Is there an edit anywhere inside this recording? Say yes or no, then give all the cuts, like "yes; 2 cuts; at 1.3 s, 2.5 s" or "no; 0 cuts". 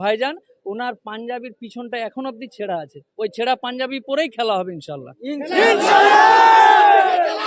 no; 0 cuts